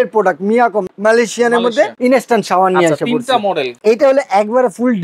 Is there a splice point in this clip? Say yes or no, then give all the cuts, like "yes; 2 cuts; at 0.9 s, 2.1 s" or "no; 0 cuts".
yes; 3 cuts; at 0.9 s, 1.9 s, 3.8 s